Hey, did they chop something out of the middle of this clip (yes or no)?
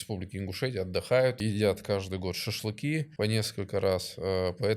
yes